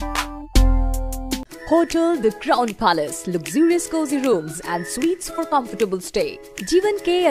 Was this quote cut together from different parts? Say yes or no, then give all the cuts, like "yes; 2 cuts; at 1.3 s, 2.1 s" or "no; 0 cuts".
no; 0 cuts